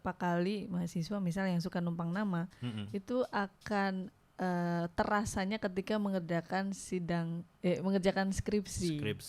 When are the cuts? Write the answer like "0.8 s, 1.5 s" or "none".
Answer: none